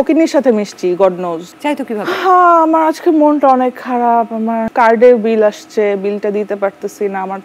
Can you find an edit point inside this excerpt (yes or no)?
yes